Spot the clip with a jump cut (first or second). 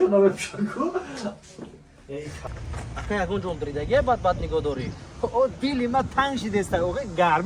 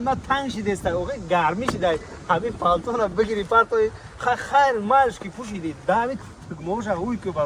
first